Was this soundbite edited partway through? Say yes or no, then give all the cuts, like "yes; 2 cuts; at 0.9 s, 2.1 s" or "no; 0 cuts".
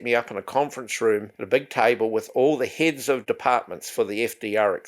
yes; 2 cuts; at 1.3 s, 3.2 s